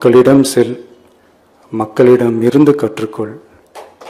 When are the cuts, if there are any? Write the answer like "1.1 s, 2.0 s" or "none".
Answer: none